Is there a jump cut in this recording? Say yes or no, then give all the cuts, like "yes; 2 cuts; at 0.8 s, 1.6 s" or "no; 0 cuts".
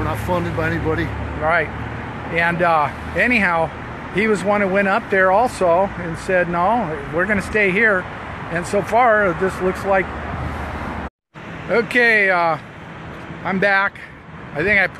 no; 0 cuts